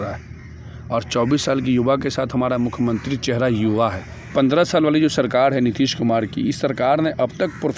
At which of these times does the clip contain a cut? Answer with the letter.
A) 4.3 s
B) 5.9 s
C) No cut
A